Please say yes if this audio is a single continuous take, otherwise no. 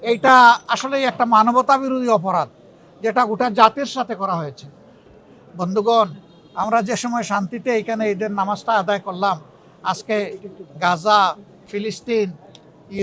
no